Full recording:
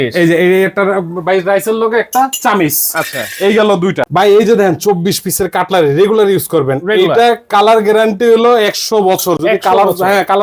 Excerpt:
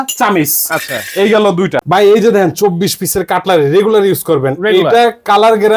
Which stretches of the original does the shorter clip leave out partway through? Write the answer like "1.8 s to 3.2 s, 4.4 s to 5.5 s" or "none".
none